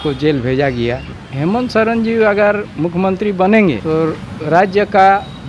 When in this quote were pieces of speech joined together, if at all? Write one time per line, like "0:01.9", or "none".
0:01.2
0:03.8

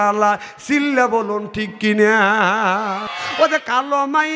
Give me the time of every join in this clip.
0:03.1

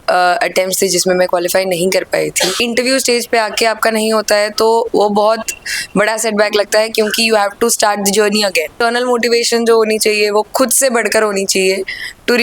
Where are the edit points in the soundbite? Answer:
0:02.6
0:08.8

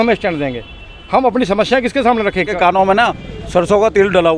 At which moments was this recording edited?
0:02.5

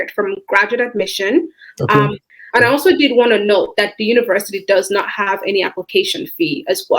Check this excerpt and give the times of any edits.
0:02.2

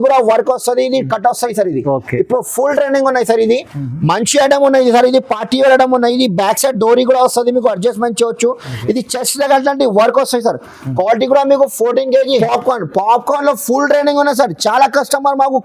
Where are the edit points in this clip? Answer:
0:12.3

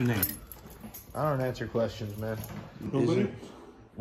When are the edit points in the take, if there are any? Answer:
0:02.8

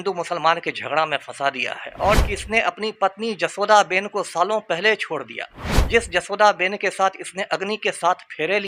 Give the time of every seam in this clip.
0:02.2

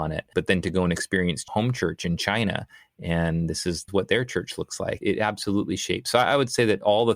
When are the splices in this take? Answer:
0:01.5
0:03.9
0:05.0

